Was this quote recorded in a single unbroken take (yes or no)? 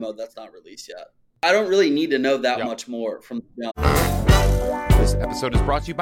no